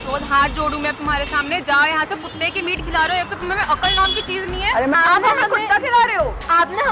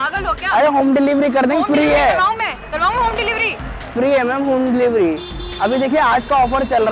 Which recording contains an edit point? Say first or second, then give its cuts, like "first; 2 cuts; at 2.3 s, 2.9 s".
first; 1 cut; at 4.9 s